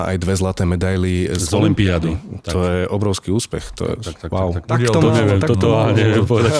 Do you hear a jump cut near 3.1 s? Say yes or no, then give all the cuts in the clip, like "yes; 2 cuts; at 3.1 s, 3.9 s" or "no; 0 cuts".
no; 1 cut; at 4.7 s